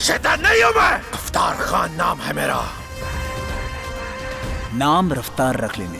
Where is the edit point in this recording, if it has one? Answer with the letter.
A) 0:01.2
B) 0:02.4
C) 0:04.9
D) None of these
A